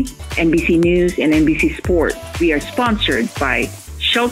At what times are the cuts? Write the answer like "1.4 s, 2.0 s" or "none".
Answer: 2.2 s